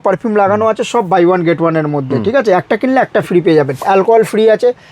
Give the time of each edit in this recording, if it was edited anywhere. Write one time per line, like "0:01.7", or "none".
0:03.8